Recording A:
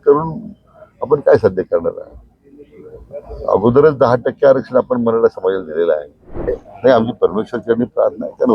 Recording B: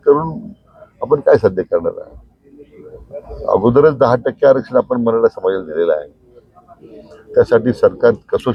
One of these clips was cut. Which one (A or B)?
A